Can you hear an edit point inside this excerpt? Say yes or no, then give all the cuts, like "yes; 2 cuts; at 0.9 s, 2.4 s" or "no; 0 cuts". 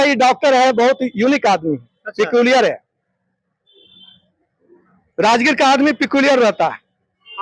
no; 0 cuts